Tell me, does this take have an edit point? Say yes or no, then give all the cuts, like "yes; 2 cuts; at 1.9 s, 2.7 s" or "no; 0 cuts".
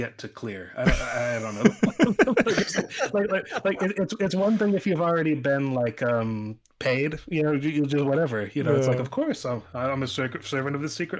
no; 0 cuts